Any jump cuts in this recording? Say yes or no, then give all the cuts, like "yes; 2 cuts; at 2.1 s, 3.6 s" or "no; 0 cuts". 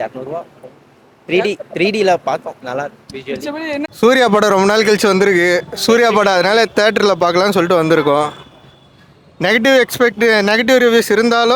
yes; 1 cut; at 3.9 s